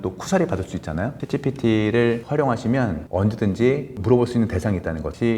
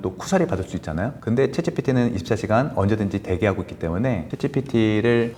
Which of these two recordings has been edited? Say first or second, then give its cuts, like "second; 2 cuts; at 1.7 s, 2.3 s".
first; 2 cuts; at 1.2 s, 3.0 s